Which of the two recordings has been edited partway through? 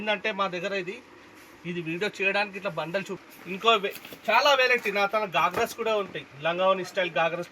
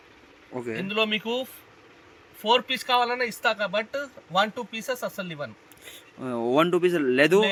first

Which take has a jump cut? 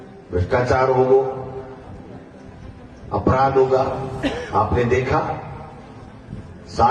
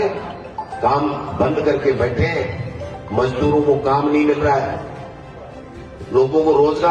first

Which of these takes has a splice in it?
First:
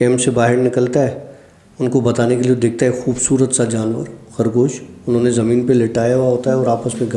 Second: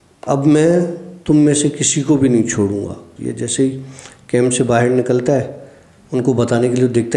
second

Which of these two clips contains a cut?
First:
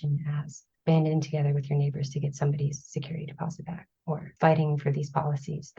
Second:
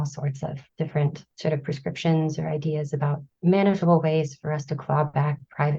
second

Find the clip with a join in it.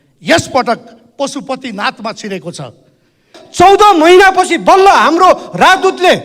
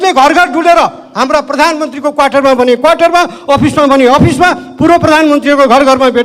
first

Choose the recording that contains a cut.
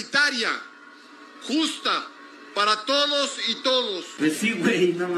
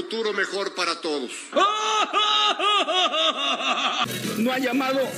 second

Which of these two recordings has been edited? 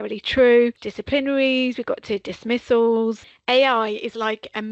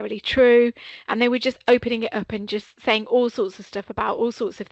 first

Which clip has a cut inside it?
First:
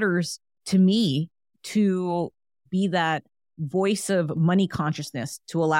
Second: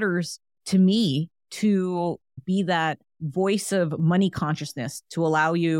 second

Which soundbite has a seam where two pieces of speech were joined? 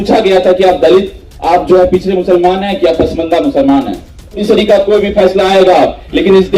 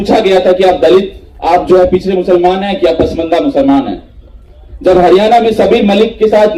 first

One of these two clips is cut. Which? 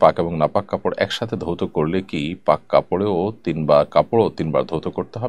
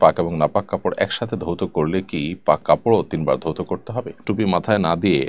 second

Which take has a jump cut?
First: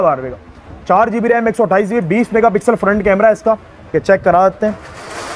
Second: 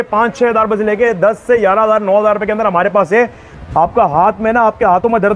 second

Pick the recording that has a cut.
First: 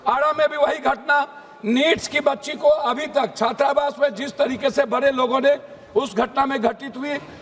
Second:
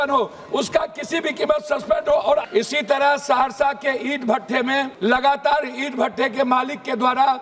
second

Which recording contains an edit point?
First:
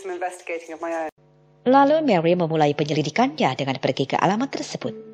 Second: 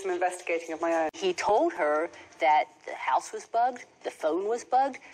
second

